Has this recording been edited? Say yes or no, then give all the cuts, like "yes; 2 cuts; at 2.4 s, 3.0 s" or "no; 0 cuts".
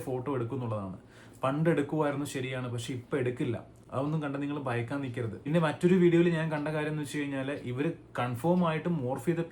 no; 0 cuts